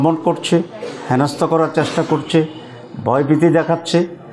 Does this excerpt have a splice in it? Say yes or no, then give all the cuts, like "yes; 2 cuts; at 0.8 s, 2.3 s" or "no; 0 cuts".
no; 0 cuts